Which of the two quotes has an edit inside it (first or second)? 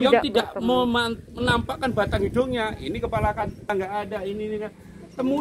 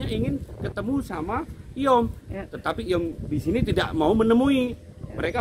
first